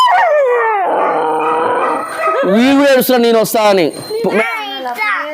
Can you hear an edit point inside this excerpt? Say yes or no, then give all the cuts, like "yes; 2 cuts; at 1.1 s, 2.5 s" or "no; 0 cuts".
yes; 1 cut; at 4.2 s